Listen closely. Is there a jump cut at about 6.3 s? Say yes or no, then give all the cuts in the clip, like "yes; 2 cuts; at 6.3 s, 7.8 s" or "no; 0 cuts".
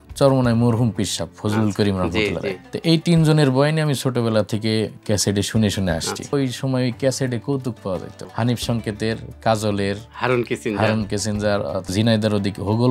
yes; 4 cuts; at 2.7 s, 6.3 s, 8.2 s, 11.9 s